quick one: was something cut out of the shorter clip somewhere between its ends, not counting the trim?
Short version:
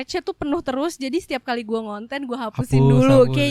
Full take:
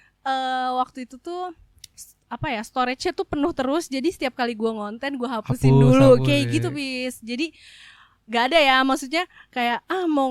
no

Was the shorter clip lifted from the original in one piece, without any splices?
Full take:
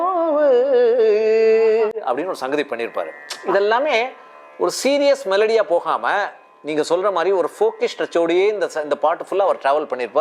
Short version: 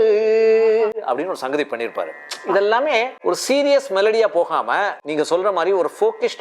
no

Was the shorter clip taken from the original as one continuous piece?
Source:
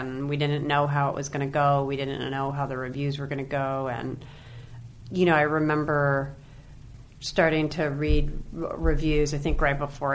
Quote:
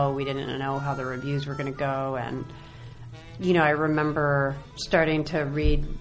no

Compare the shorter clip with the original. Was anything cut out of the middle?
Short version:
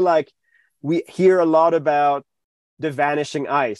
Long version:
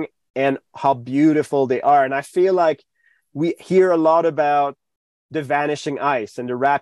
no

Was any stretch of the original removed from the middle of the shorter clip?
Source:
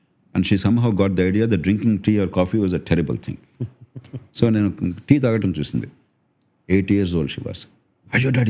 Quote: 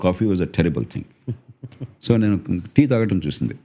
no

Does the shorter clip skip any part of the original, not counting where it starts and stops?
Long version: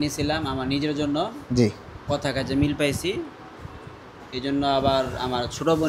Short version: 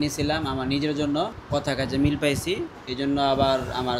yes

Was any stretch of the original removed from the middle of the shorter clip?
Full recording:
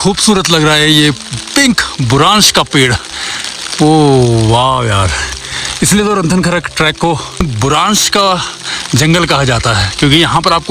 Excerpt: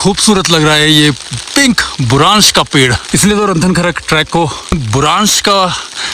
yes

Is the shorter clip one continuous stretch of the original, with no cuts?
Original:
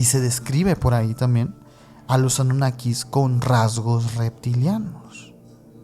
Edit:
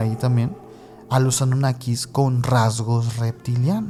yes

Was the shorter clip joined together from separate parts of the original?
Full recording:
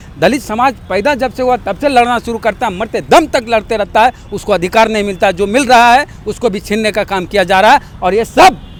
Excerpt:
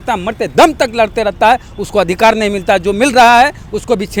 no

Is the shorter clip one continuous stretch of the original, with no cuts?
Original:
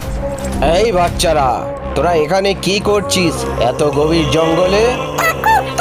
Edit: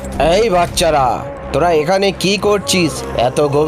yes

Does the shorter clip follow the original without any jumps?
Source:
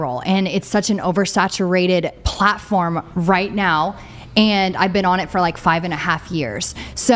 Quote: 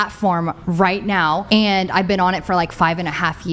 no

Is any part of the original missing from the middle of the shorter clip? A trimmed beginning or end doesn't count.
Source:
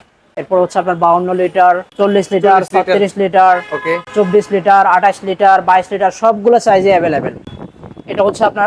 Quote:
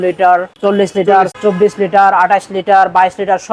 yes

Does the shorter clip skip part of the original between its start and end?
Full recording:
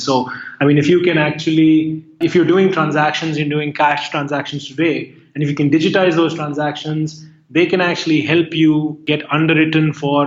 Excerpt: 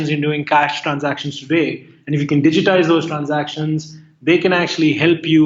no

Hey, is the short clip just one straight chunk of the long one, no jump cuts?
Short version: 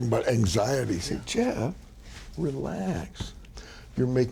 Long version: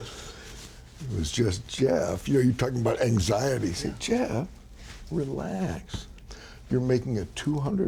yes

